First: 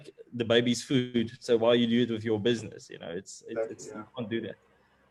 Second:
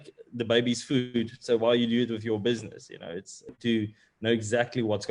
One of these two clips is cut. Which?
second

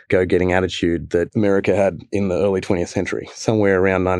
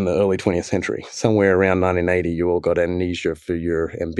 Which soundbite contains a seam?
first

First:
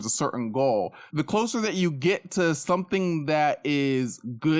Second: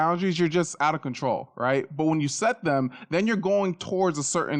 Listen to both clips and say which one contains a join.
first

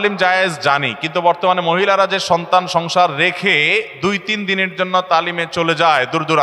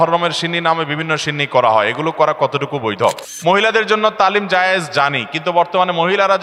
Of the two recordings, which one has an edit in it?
second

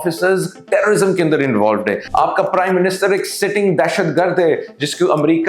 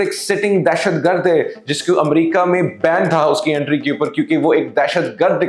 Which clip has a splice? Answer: first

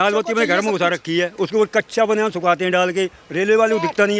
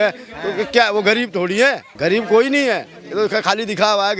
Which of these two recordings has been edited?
second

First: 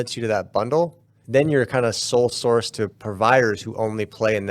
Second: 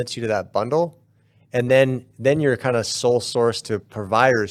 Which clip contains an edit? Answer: first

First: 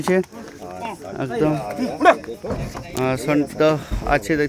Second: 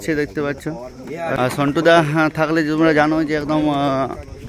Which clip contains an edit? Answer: second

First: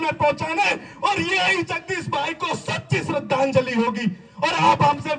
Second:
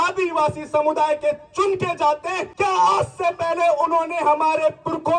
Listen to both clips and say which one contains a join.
second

